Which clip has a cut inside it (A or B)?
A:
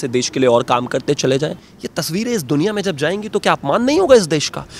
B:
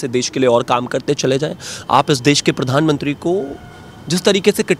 A